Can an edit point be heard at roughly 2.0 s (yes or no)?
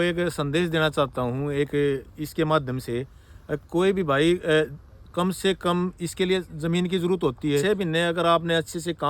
no